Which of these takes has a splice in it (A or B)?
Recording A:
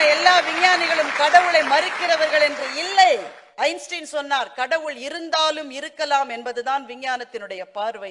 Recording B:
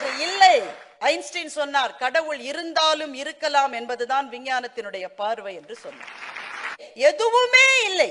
B